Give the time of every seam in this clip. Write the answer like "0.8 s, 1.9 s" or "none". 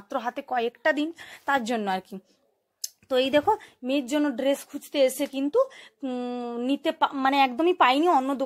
none